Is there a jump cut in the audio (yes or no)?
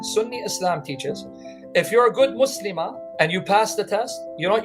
yes